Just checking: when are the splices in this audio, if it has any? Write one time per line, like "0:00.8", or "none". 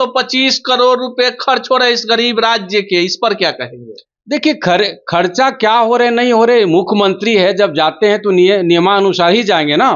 none